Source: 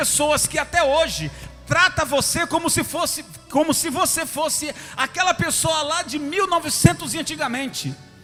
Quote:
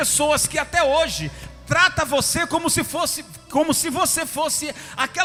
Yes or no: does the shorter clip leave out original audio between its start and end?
no